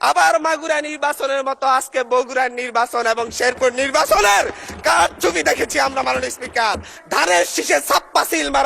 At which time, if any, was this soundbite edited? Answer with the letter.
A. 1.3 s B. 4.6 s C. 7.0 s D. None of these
C